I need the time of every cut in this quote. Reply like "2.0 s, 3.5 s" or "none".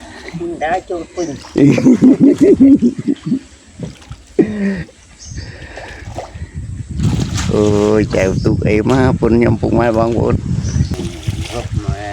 10.9 s